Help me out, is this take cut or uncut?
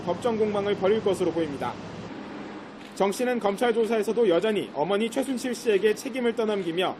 cut